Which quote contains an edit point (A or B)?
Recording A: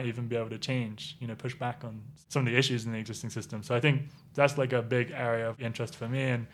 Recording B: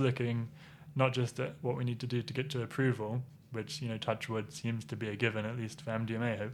A